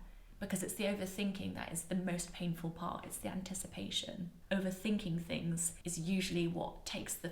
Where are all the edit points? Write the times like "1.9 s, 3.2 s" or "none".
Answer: 4.3 s